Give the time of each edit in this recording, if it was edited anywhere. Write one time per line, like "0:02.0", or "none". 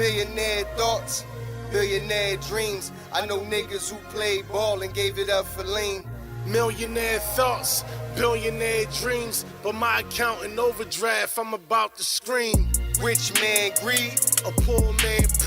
0:00.9